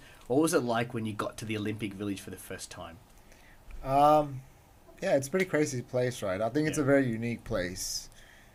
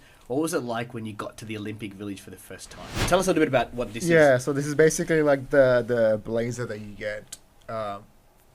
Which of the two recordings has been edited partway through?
second; 1 cut; at 3.0 s

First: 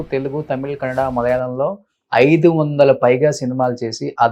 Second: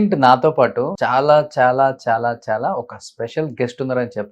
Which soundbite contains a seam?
second; 1 cut; at 0.9 s

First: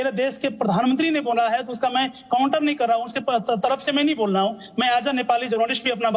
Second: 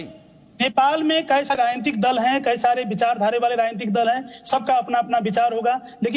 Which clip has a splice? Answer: second; 1 cut; at 1.5 s

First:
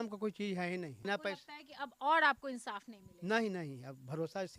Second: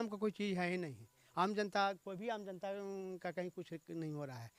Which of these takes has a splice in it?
first; 1 cut; at 1.0 s

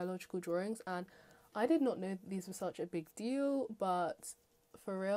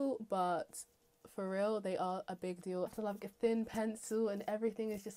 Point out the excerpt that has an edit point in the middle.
second; 1 cut; at 2.9 s

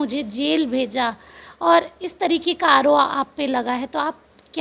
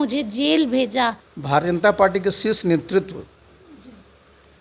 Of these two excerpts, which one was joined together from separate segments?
second; 1 cut; at 1.3 s

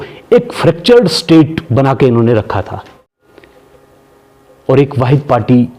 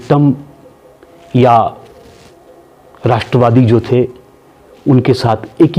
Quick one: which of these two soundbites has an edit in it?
first; 1 cut; at 3.0 s

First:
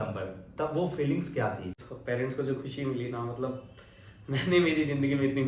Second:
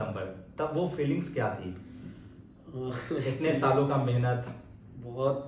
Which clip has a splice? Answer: first; 1 cut; at 1.9 s

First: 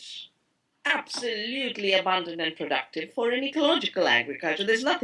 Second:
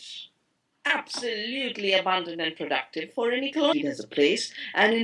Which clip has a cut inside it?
first; 1 cut; at 3.7 s

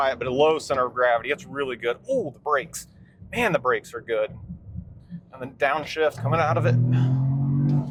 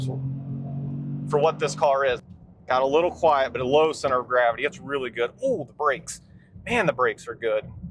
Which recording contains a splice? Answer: second; 1 cut; at 2.2 s

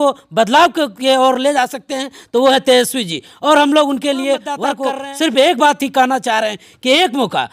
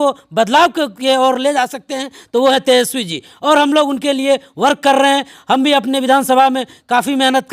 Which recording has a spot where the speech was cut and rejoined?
first; 1 cut; at 4.7 s

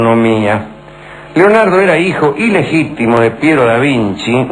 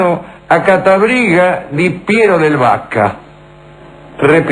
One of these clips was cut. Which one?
first; 1 cut; at 2.2 s

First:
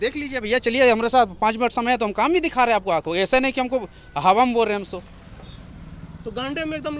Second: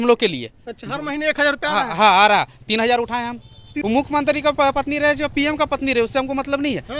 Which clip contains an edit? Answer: second; 1 cut; at 3.8 s

